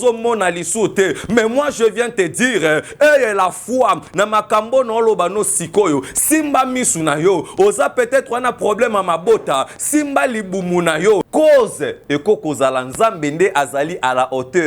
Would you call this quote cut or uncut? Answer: cut